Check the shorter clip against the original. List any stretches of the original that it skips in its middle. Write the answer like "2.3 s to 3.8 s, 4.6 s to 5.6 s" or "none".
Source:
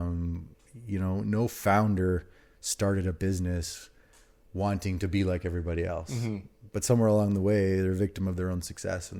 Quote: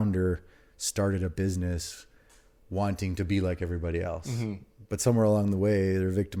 none